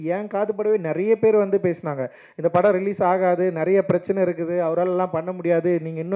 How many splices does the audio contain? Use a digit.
0